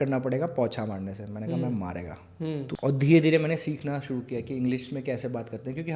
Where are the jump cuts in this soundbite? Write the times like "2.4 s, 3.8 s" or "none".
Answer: 2.7 s

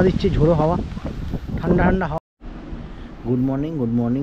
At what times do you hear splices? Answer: 2.2 s

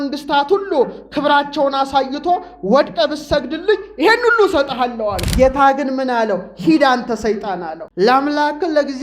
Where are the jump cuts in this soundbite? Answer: 5.2 s, 7.8 s

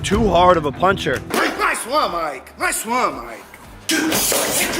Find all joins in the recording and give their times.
1.3 s

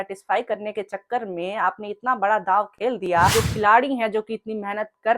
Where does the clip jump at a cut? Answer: 3.3 s

